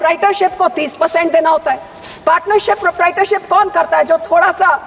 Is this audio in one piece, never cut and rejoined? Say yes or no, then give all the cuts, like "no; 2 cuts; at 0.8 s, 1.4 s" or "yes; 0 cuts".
yes; 0 cuts